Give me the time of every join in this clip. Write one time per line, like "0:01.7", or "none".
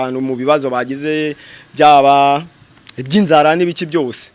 none